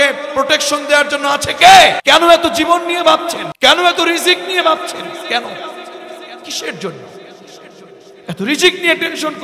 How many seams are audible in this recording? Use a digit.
2